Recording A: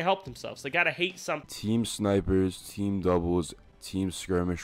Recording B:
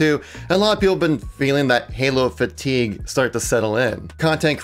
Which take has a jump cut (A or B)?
A